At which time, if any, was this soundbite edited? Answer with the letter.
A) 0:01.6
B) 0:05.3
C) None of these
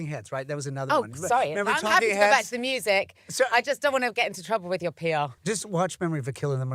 B